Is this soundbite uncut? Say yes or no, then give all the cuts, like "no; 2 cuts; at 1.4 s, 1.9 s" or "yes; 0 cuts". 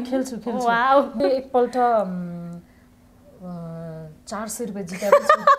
no; 1 cut; at 1.2 s